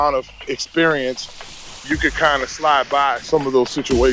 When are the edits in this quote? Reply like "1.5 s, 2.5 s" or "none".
1.8 s, 3.2 s